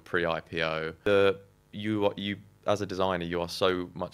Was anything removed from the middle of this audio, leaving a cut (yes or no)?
yes